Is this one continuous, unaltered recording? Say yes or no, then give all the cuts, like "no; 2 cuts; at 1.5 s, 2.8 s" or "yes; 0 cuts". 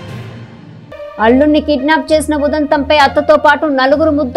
yes; 0 cuts